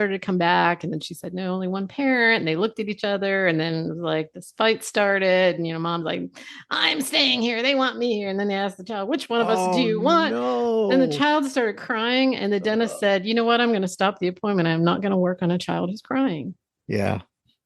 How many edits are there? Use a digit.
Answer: 1